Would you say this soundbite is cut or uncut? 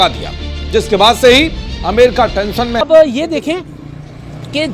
cut